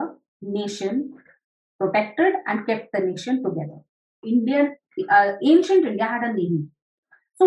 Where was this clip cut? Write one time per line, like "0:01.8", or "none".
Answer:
0:04.2